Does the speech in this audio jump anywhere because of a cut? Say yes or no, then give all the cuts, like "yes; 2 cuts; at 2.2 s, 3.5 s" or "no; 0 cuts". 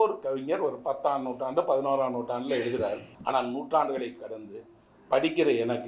yes; 1 cut; at 3.1 s